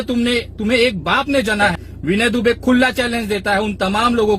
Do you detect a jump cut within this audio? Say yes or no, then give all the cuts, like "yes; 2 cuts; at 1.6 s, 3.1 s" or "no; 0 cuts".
yes; 1 cut; at 1.9 s